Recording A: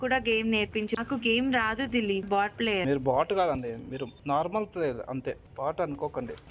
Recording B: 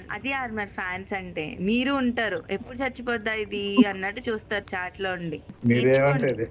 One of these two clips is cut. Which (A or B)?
A